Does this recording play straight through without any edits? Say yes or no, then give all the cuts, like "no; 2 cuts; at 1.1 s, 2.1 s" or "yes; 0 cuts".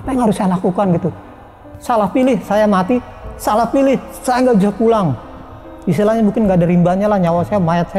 no; 1 cut; at 1.7 s